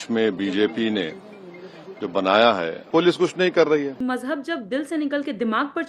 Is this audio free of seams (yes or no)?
no